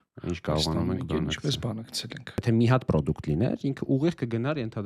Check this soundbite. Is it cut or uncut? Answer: cut